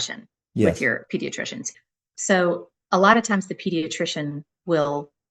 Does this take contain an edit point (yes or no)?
yes